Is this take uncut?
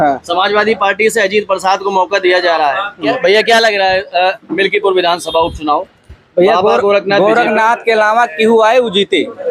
yes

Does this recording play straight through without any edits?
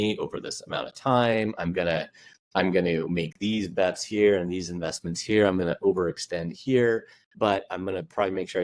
yes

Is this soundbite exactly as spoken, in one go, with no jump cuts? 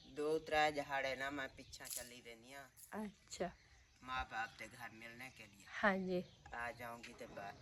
yes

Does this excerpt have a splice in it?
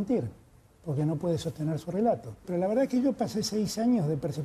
yes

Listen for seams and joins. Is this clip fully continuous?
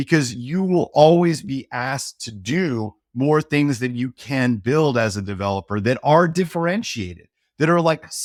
yes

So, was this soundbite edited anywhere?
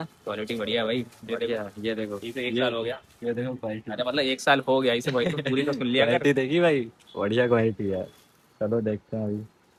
no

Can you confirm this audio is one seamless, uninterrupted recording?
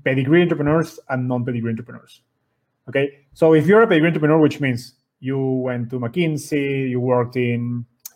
yes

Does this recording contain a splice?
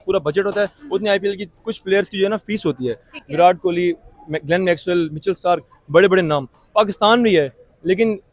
no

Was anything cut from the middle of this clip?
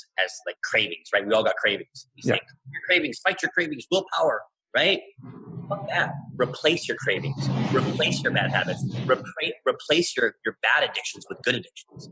no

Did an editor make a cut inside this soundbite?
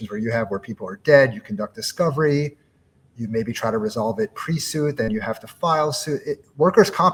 no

